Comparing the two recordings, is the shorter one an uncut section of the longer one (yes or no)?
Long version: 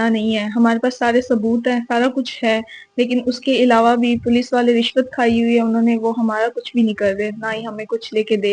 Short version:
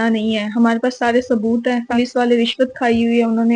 no